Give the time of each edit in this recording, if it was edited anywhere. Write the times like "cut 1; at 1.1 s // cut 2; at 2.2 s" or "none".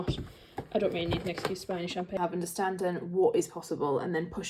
cut 1; at 2.1 s